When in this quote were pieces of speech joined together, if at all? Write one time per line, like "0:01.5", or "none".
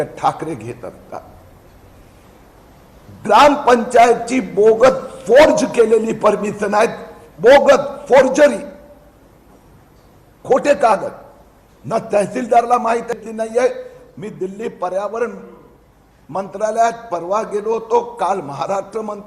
0:13.1